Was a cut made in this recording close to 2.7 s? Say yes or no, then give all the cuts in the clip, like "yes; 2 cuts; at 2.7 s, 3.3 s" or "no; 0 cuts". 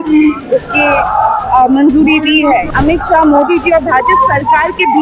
yes; 1 cut; at 2.7 s